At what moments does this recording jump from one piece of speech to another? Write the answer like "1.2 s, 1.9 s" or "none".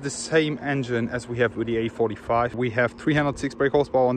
2.6 s